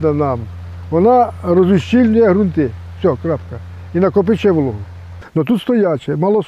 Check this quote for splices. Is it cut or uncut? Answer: cut